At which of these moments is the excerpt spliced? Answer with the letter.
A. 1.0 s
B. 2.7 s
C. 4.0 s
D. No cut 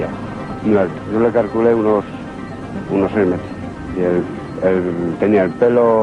A